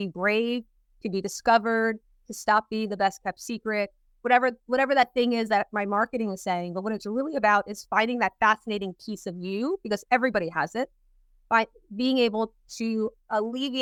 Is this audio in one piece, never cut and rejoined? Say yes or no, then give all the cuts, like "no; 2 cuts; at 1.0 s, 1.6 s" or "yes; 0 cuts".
yes; 0 cuts